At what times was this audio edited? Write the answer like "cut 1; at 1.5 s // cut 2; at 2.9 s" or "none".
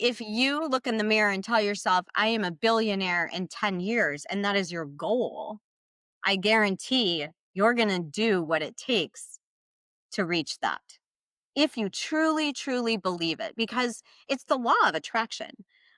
none

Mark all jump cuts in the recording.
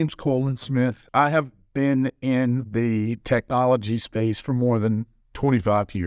cut 1; at 1.0 s

